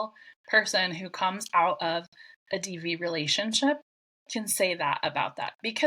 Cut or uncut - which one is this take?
uncut